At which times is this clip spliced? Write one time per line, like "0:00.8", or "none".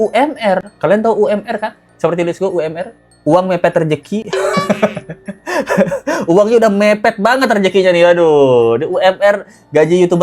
none

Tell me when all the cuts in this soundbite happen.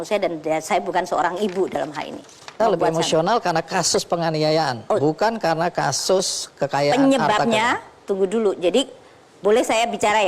0:02.5

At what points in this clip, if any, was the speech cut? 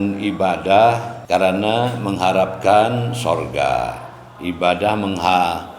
0:01.1

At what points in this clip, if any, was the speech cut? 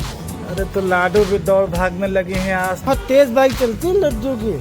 0:02.8

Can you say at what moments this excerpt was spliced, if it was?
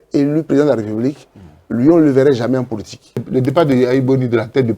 0:03.2

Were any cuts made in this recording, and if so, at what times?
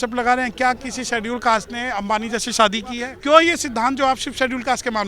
0:03.1

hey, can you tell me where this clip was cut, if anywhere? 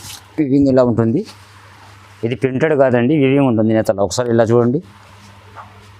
none

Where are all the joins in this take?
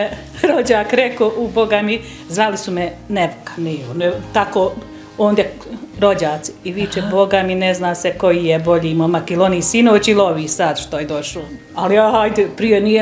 0:11.3

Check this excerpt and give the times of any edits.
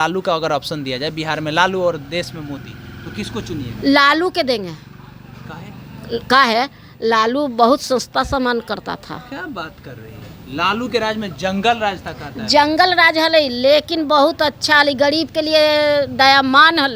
none

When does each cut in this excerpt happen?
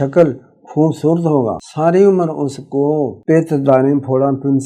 0:01.6
0:03.2

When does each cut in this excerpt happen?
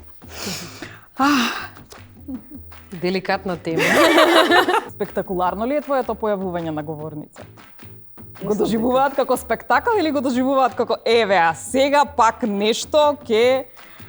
0:04.8

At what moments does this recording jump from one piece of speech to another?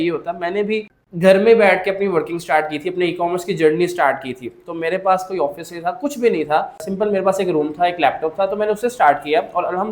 0:01.0
0:06.9

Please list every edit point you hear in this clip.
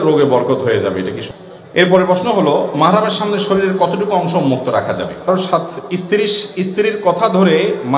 0:01.2
0:05.3

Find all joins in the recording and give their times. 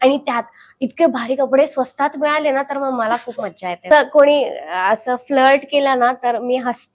0:03.8

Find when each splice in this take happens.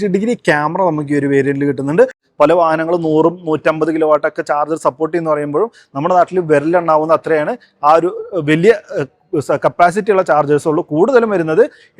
0:02.2

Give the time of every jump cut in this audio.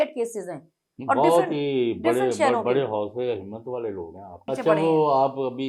0:04.4

